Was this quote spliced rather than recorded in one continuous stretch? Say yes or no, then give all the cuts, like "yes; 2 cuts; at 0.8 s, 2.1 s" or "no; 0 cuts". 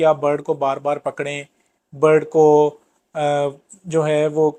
no; 0 cuts